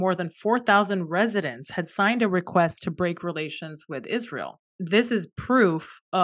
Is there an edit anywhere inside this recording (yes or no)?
yes